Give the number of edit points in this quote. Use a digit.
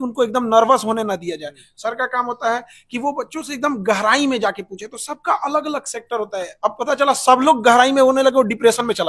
0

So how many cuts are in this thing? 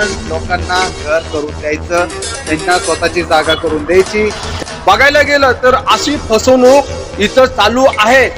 1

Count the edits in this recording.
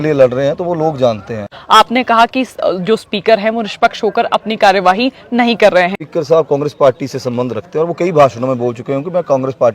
2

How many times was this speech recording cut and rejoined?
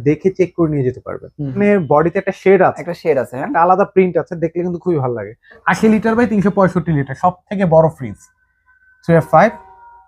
2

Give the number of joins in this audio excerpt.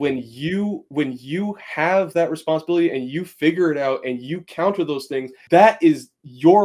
1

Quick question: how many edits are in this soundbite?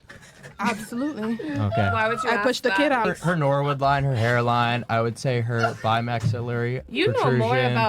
1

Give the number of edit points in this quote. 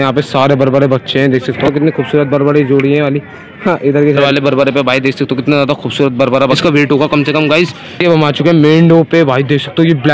4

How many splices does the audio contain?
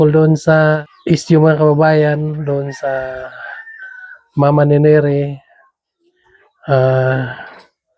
1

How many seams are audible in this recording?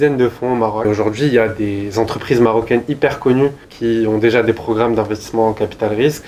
2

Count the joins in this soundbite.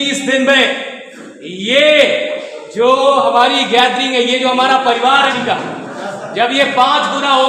1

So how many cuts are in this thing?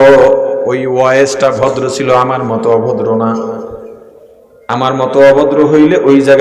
0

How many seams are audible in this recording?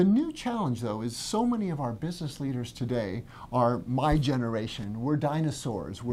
0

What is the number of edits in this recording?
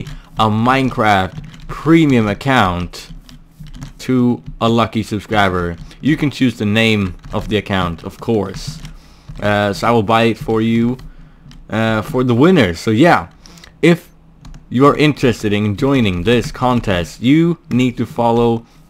1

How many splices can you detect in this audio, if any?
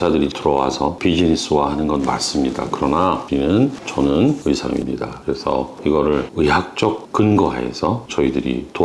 0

